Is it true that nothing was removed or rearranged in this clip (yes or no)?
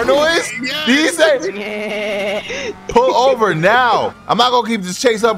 no